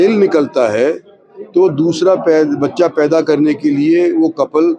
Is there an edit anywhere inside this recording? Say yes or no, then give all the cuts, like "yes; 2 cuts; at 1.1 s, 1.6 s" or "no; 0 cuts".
no; 0 cuts